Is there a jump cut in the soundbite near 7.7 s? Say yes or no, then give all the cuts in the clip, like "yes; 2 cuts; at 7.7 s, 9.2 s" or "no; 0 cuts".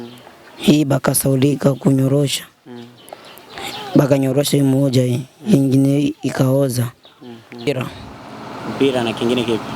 yes; 1 cut; at 7.7 s